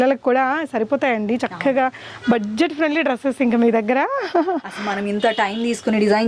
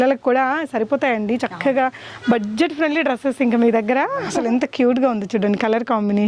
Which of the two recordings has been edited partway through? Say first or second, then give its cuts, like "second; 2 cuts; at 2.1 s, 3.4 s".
second; 1 cut; at 4.3 s